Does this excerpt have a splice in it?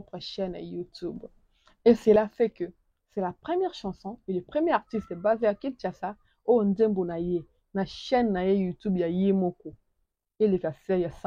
no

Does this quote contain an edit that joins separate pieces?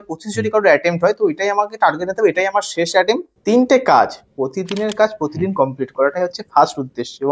yes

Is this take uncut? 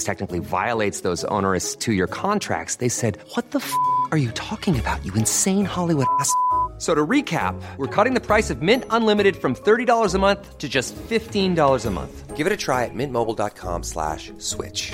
yes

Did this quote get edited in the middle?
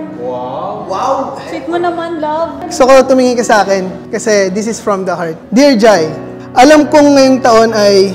yes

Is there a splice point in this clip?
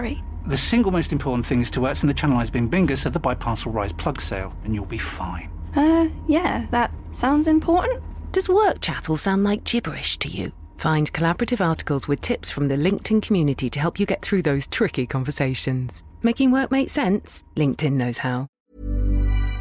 yes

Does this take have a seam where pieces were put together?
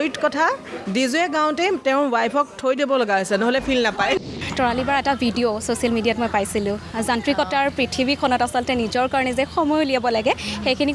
yes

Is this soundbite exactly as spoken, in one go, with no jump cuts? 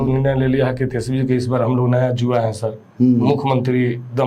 yes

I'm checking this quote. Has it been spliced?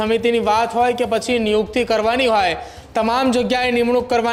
no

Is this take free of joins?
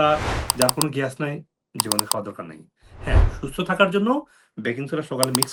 yes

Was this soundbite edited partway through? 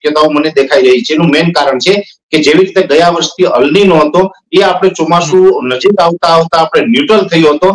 no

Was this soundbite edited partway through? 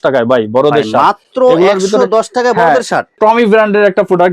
yes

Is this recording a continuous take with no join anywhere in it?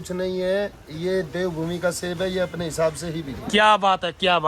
yes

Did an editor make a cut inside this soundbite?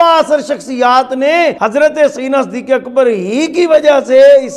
yes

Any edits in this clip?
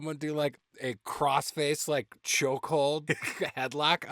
no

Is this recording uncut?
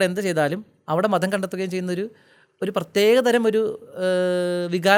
yes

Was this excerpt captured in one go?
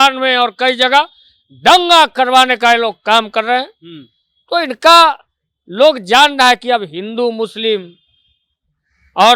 yes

